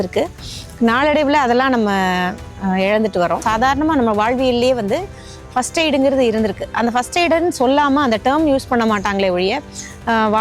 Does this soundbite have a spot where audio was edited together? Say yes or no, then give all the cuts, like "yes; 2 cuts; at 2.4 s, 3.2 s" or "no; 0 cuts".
yes; 1 cut; at 3.4 s